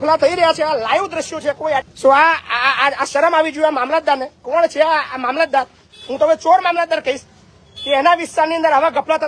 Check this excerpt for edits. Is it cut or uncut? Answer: cut